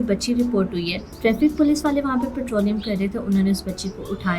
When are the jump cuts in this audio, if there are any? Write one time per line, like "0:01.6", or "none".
0:01.0